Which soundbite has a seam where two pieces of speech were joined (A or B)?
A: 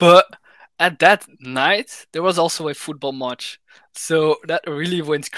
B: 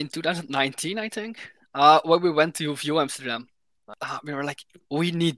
B